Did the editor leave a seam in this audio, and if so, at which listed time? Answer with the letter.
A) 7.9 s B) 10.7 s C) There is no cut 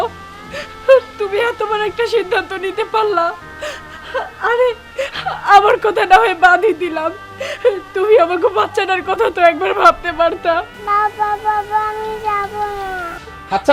B